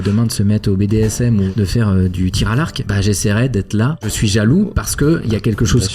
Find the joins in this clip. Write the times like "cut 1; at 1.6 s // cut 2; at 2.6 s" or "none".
cut 1; at 1.5 s // cut 2; at 2.8 s // cut 3; at 4.1 s